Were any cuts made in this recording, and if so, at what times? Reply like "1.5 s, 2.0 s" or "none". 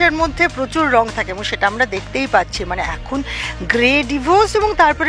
none

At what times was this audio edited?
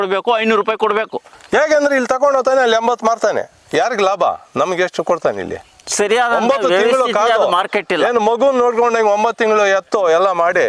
1.2 s

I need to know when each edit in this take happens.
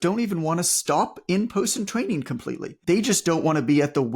2.7 s

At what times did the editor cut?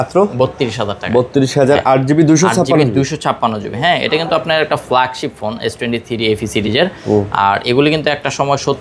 none

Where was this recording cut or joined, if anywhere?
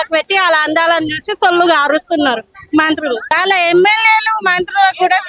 3.3 s

